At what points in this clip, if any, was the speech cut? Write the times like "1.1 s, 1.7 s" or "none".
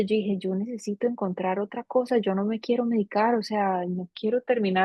none

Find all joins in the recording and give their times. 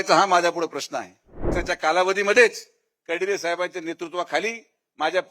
1.5 s

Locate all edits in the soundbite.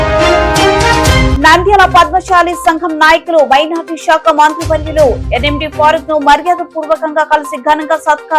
none

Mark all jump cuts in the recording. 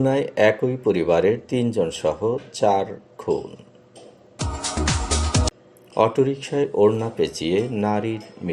none

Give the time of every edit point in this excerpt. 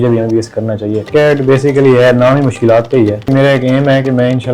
1.1 s, 3.3 s

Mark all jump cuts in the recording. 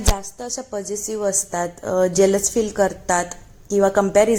none

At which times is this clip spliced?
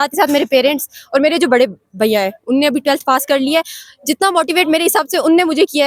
none

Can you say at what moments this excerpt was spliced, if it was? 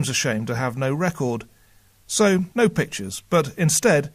2.9 s

